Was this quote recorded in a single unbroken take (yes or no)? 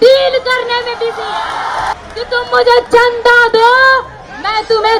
no